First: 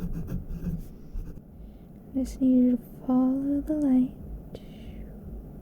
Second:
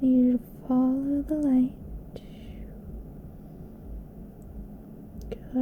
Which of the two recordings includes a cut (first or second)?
first